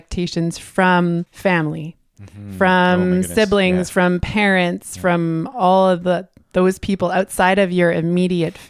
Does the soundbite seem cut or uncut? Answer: cut